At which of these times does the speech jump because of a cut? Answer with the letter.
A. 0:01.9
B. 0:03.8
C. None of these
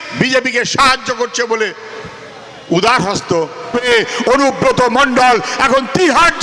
B